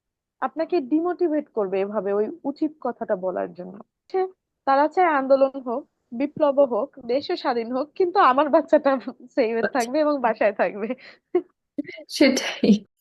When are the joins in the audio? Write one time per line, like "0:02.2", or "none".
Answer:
0:04.1